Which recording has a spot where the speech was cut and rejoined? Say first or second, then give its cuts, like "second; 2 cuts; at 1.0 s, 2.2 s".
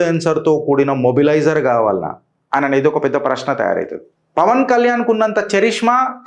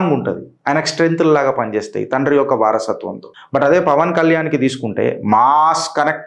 first; 1 cut; at 4.2 s